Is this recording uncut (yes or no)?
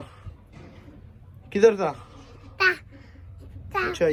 yes